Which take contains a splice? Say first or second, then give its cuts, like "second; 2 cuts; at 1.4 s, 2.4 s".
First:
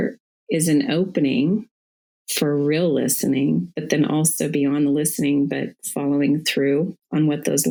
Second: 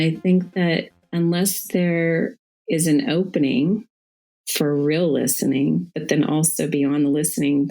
second; 1 cut; at 1.0 s